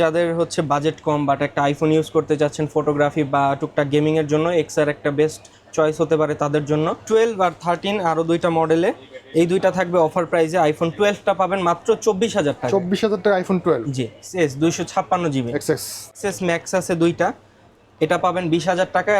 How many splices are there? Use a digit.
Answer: 3